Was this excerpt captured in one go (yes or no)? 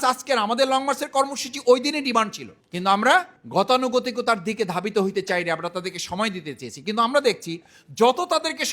yes